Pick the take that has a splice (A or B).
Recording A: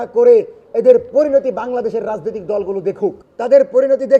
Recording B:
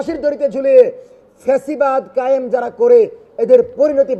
A